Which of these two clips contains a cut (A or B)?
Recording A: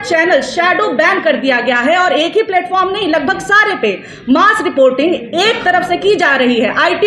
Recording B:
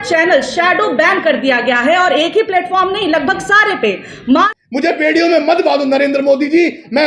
B